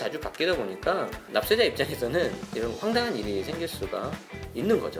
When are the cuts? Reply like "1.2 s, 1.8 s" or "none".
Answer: none